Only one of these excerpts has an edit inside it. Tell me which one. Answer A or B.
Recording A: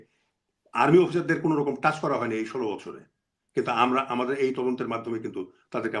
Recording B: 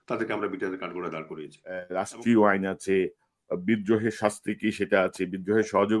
B